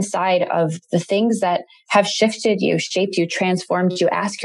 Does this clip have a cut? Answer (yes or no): no